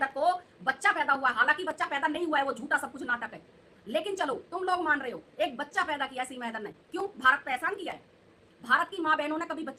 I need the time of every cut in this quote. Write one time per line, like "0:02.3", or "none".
none